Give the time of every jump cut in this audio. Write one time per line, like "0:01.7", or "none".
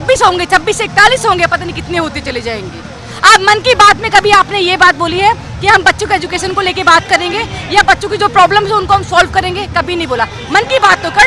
none